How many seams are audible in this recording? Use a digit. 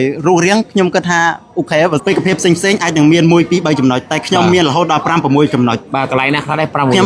1